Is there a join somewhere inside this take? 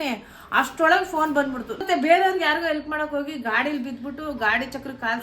yes; 1 cut; at 1.6 s

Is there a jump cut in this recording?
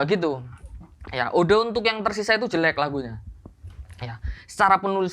no; 0 cuts

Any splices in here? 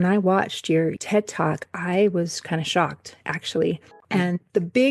yes; 2 cuts; at 1.0 s, 3.9 s

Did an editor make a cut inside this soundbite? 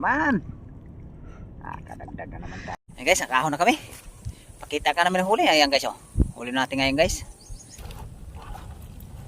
yes; 2 cuts; at 2.7 s, 7.8 s

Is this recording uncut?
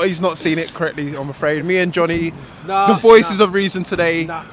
yes; 0 cuts

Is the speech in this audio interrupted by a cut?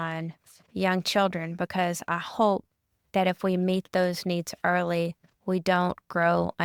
no; 0 cuts

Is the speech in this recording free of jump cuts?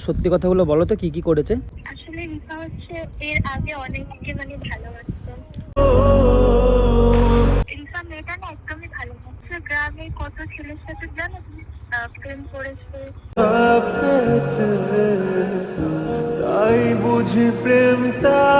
no; 3 cuts; at 1.8 s, 7.7 s, 9.4 s

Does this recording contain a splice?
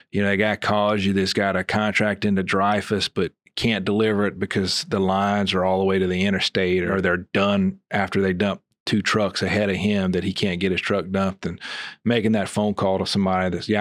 yes; 1 cut; at 6.9 s

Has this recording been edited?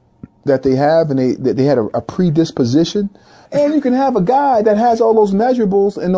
yes; 1 cut; at 3.4 s

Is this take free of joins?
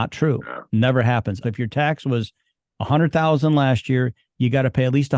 no; 1 cut; at 1.4 s

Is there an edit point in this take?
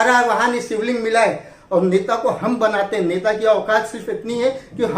yes; 1 cut; at 1.5 s

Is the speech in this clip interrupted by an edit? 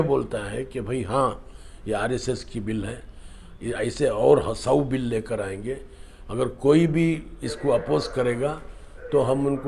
no; 0 cuts

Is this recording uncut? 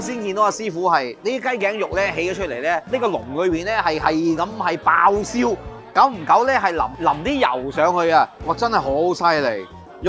no; 4 cuts; at 1.1 s, 2.9 s, 6.9 s, 8.5 s

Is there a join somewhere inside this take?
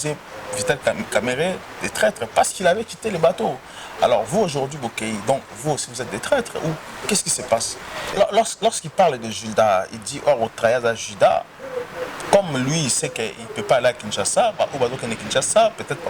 yes; 1 cut; at 8.1 s

